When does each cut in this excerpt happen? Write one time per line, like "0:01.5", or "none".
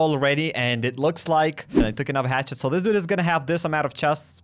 0:01.7